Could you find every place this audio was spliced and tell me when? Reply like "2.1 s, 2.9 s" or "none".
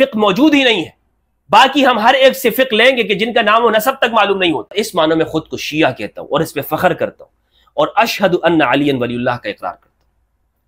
4.7 s